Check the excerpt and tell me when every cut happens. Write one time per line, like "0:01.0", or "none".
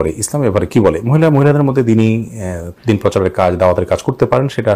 none